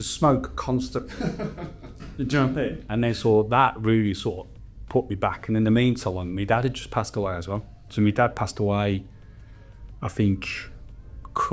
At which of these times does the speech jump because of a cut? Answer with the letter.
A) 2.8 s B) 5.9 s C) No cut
A